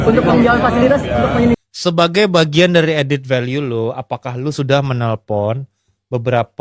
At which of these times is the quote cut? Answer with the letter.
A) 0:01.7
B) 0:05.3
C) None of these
A